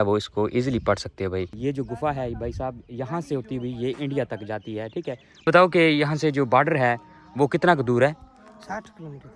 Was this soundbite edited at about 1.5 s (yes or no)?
yes